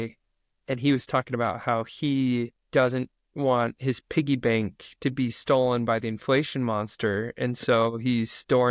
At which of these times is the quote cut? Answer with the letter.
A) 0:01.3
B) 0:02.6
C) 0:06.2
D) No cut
B